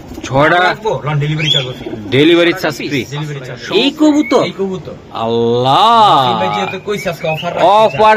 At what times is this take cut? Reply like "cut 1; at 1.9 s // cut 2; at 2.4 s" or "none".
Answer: cut 1; at 3.8 s